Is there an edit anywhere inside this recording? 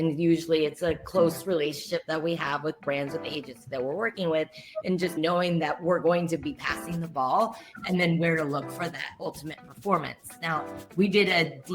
yes; 1 cut; at 5.2 s

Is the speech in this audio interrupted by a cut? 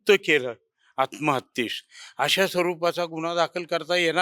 no; 0 cuts

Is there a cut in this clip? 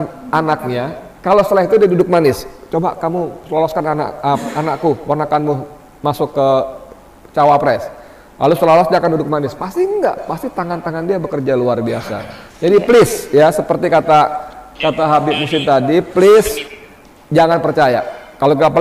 no; 0 cuts

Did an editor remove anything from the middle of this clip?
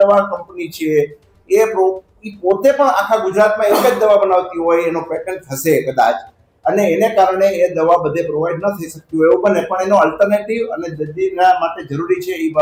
no; 0 cuts

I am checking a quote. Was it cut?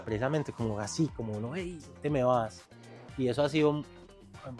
no; 0 cuts

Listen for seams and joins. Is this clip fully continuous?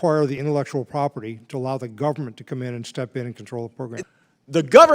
no; 1 cut; at 4.0 s

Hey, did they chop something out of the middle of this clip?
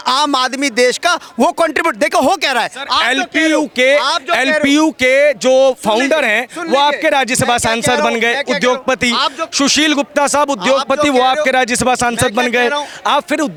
no; 0 cuts

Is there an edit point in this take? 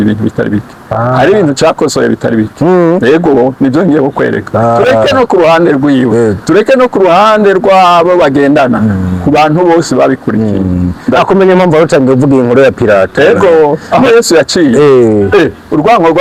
no; 0 cuts

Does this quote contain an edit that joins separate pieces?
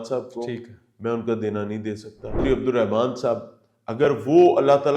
yes; 1 cut; at 2.4 s

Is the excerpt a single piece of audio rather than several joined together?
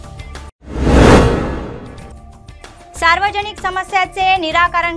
no; 1 cut; at 2.9 s

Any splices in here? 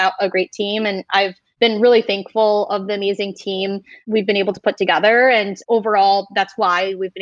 yes; 1 cut; at 1.4 s

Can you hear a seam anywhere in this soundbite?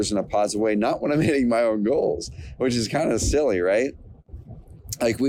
no; 0 cuts

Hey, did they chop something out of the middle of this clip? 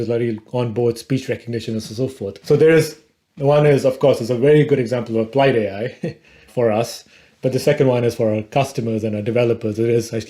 yes; 1 cut; at 2.4 s

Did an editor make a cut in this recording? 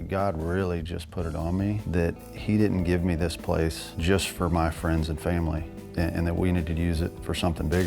yes; 3 cuts; at 1.8 s, 3.9 s, 5.8 s

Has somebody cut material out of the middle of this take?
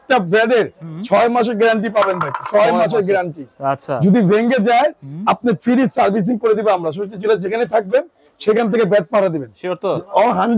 no; 0 cuts

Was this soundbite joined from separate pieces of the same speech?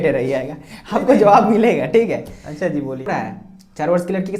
yes; 1 cut; at 3.1 s

